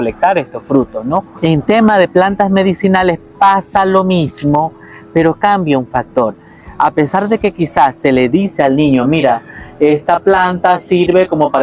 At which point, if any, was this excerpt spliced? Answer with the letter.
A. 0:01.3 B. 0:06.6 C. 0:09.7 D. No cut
A